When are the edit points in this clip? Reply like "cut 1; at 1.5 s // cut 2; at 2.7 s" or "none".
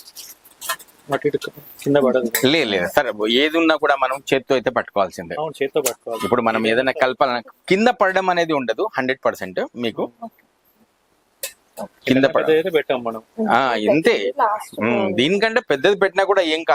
none